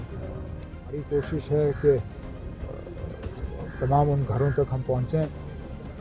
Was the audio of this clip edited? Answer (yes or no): yes